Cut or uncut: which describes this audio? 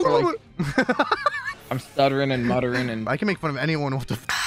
cut